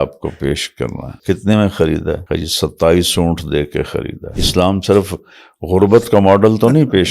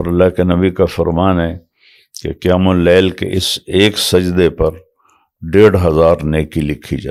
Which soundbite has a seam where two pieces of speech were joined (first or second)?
first